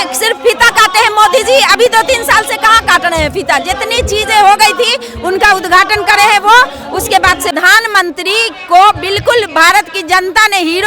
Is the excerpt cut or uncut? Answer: cut